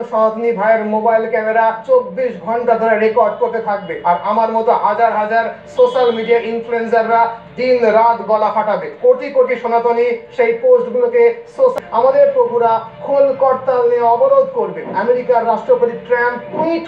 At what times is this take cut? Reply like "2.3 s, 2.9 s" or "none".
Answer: 11.7 s